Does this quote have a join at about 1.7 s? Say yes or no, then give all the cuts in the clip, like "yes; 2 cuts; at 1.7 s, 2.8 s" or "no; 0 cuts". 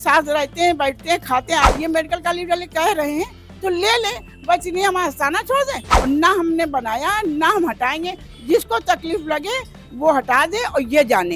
yes; 2 cuts; at 1.7 s, 5.9 s